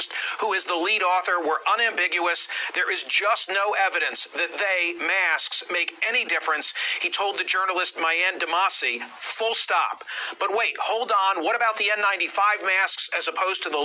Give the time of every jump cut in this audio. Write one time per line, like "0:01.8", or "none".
0:01.7
0:11.6